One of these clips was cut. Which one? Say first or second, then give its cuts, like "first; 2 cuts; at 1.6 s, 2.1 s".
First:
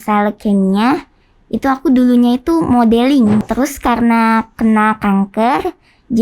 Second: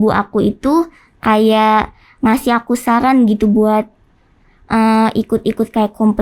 first; 1 cut; at 3.4 s